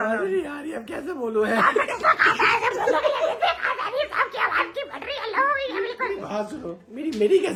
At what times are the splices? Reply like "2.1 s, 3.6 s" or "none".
none